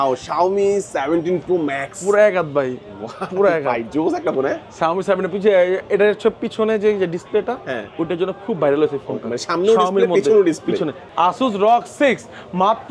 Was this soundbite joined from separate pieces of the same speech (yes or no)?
yes